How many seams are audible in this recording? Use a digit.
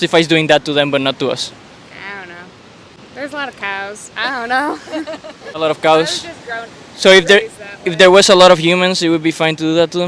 2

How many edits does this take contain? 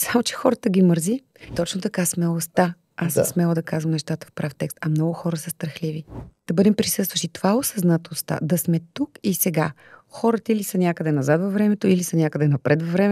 2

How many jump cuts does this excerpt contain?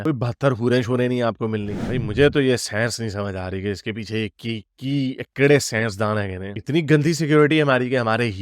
1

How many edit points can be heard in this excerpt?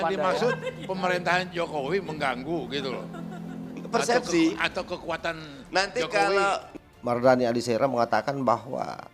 1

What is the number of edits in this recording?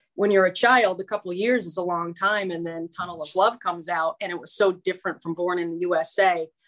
0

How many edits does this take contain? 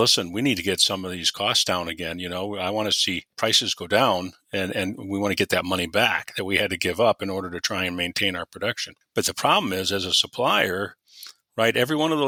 0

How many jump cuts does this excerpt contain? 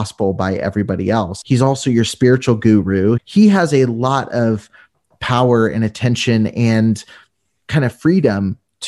2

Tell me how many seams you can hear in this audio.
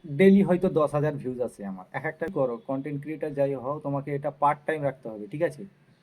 1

